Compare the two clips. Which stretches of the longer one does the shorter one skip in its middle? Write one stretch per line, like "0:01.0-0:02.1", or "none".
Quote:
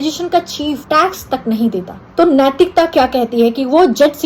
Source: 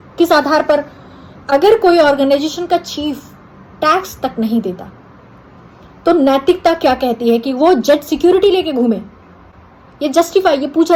0:03.2-0:03.7
0:04.9-0:05.9